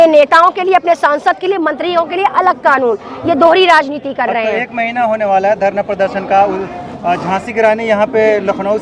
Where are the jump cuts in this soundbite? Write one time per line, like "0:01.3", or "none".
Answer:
none